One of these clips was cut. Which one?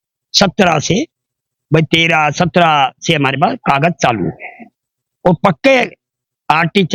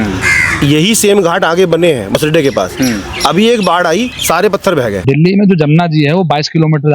second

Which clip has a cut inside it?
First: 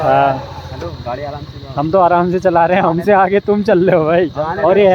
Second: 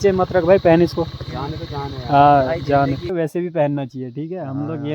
second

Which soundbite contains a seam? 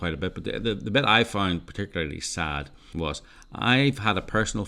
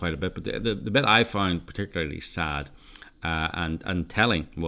first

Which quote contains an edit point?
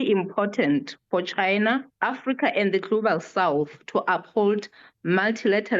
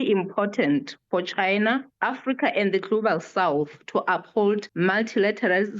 second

